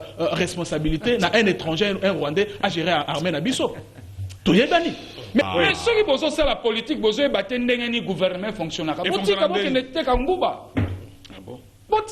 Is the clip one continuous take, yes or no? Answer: no